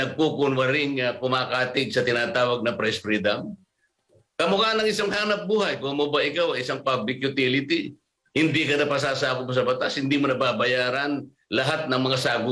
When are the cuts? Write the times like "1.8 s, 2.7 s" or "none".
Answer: none